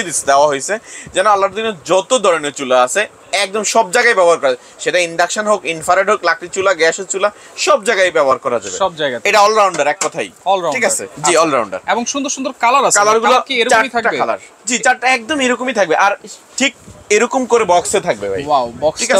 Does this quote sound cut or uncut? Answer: uncut